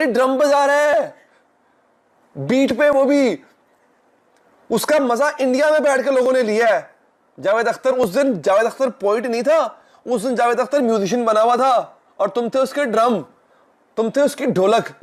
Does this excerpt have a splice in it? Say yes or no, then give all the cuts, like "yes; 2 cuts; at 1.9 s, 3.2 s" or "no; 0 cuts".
no; 0 cuts